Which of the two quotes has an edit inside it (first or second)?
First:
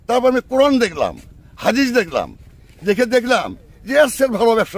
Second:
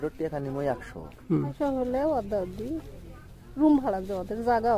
second